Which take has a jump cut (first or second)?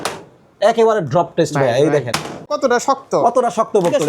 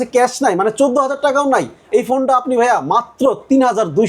first